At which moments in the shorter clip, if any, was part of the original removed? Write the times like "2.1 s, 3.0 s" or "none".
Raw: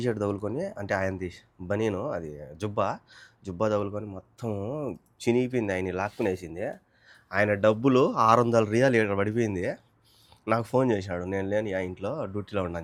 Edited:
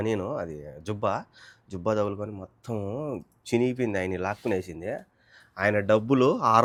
none